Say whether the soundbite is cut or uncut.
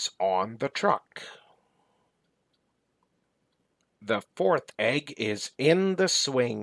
cut